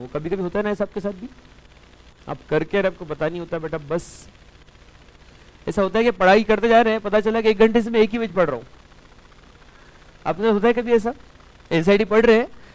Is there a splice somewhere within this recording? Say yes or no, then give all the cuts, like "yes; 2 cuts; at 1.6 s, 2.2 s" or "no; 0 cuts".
no; 0 cuts